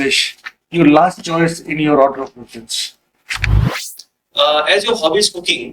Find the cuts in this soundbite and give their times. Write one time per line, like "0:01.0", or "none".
0:03.7